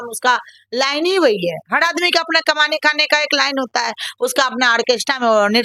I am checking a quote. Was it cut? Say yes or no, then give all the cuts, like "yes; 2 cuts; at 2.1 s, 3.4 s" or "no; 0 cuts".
no; 0 cuts